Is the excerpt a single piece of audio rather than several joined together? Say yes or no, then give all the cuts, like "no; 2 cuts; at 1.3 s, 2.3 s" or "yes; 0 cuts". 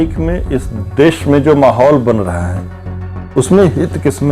yes; 0 cuts